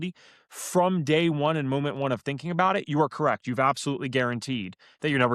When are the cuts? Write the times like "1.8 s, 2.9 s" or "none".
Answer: none

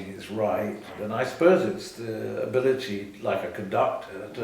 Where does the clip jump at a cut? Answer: 1.0 s

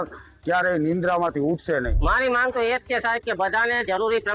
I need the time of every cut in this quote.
1.9 s

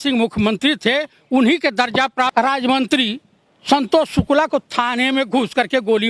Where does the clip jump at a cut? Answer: 2.3 s

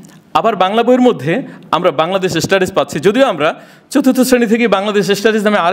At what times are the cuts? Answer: none

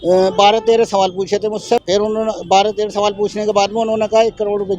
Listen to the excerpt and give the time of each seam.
1.8 s

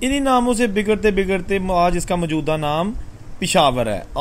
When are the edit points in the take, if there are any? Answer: none

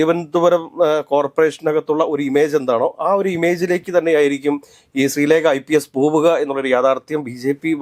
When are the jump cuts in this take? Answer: none

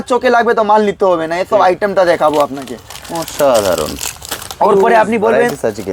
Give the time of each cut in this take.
none

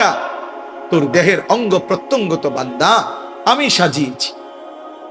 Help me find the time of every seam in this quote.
4.1 s

